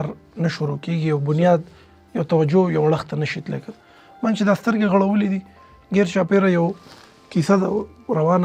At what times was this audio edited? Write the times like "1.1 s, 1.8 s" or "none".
none